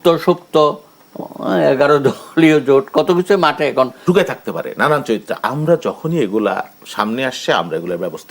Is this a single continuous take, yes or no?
no